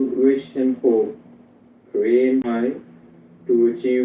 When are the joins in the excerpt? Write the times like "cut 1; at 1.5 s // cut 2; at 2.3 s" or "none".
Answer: cut 1; at 2.5 s